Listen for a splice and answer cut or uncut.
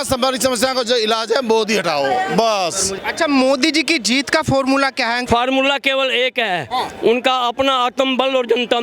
cut